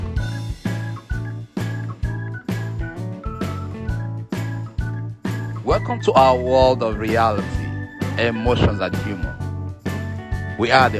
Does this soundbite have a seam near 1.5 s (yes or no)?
no